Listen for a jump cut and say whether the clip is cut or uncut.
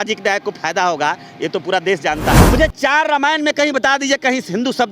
cut